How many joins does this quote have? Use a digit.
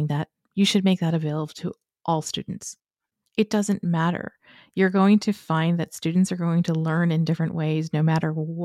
1